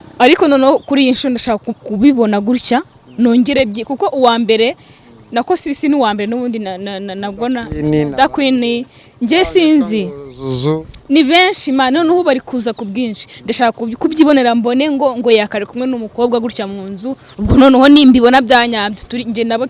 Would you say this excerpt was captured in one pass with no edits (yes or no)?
yes